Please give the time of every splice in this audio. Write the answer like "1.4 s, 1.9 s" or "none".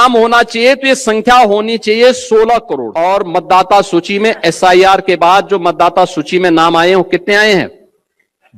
2.8 s